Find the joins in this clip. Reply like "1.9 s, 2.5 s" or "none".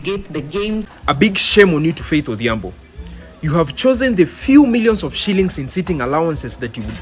0.9 s